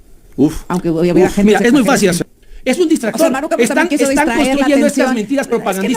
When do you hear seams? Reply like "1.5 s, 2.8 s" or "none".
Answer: 2.2 s